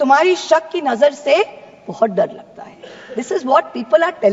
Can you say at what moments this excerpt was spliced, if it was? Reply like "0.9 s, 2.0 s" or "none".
none